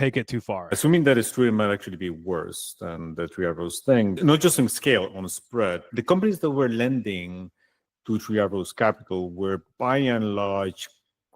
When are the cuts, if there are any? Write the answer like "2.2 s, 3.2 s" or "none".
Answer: 0.8 s, 4.2 s, 5.9 s

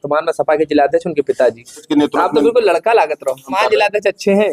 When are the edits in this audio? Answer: 1.9 s, 3.5 s

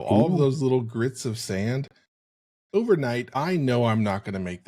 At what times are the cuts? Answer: 3.3 s

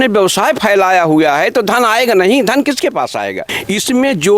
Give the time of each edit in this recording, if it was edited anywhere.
3.5 s

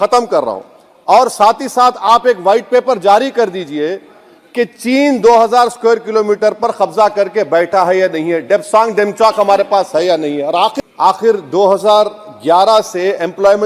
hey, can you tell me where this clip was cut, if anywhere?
10.7 s

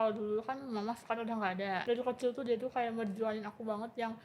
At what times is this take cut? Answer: 1.8 s

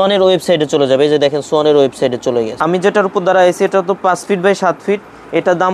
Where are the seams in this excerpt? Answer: 2.5 s

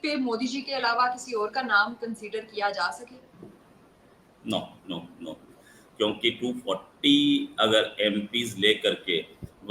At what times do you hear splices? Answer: none

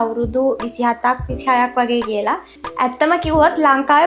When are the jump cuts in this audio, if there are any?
2.6 s

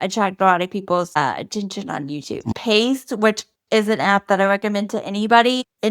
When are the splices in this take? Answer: 2.5 s

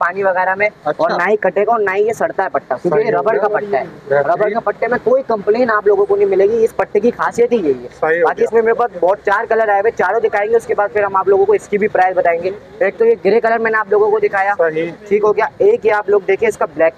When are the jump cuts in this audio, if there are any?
none

